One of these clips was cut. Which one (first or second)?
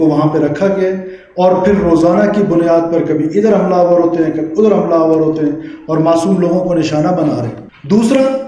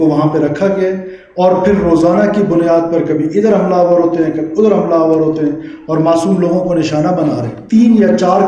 second